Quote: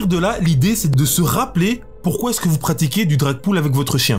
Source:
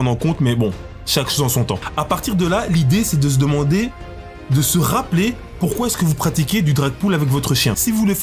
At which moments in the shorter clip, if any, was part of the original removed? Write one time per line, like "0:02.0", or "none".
0:00.9